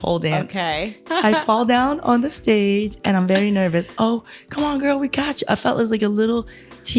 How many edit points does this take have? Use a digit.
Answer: 1